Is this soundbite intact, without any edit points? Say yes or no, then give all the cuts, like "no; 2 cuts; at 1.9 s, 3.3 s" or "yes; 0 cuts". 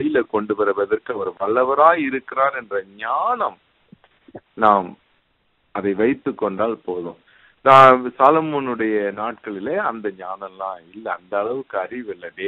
yes; 0 cuts